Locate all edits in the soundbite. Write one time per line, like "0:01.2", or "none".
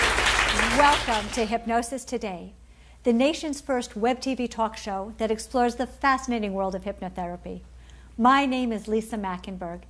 0:03.6